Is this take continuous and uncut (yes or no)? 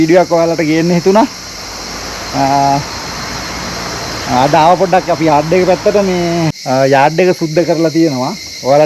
no